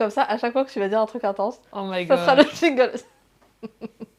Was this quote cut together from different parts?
no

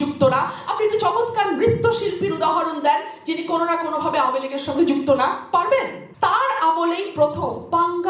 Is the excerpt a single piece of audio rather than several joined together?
no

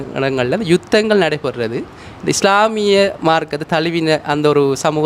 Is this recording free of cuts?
yes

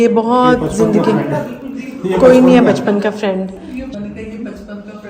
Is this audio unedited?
no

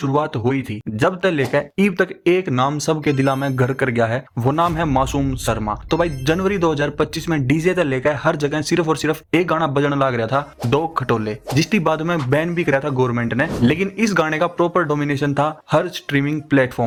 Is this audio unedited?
yes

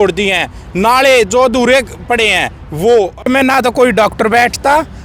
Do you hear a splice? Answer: yes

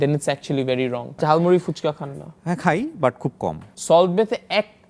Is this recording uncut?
no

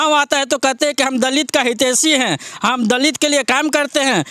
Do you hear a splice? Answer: no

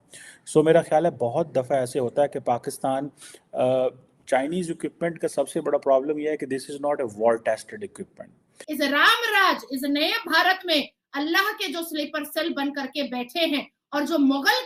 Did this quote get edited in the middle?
yes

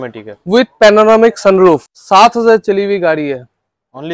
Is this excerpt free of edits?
no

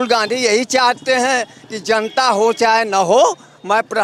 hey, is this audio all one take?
yes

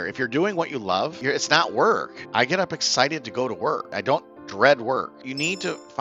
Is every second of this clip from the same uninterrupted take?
no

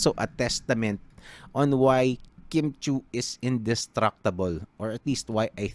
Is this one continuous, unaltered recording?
yes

